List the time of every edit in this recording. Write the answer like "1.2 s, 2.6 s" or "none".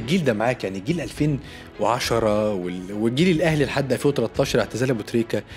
none